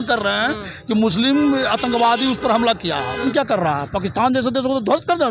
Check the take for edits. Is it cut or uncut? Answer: cut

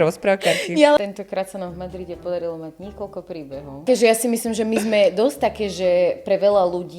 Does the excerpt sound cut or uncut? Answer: cut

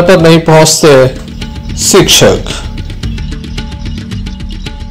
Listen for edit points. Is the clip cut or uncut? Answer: uncut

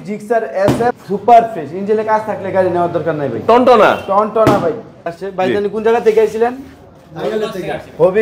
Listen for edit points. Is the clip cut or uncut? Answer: cut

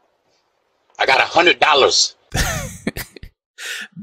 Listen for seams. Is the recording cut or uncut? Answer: cut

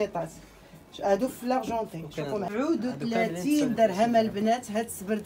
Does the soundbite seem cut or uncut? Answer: cut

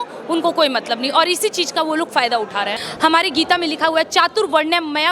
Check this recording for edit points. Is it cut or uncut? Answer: cut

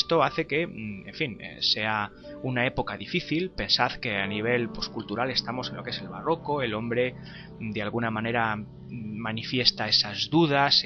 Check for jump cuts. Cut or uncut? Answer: cut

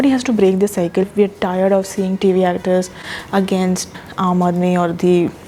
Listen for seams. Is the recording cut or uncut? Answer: cut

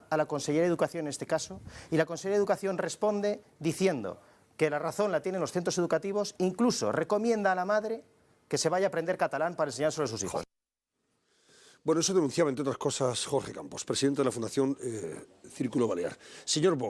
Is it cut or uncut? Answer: uncut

